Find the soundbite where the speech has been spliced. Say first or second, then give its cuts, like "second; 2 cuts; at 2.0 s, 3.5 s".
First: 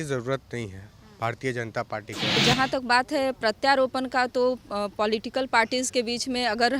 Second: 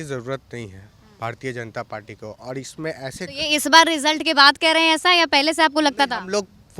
first; 1 cut; at 2.4 s